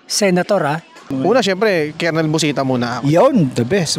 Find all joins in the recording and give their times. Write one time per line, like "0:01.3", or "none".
0:01.0